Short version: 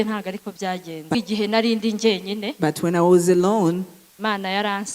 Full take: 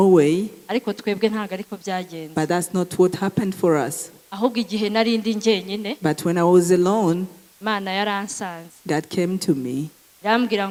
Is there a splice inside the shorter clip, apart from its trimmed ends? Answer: yes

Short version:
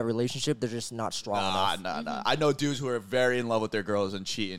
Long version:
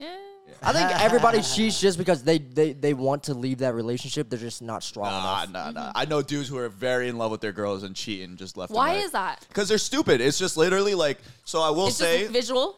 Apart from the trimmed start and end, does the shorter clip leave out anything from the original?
no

